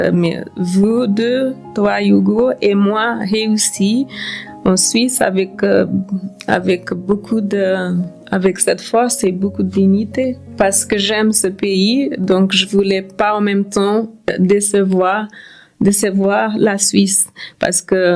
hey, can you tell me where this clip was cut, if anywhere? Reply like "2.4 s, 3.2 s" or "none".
none